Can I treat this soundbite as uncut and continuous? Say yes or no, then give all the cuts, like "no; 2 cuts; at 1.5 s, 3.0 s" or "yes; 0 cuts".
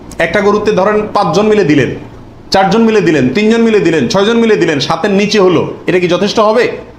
yes; 0 cuts